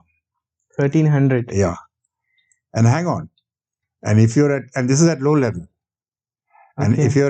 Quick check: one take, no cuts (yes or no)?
yes